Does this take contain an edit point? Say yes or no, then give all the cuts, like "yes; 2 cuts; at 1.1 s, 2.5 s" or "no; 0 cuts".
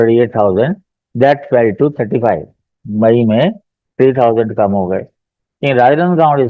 no; 0 cuts